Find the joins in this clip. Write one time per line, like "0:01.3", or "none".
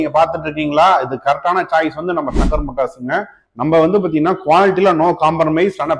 none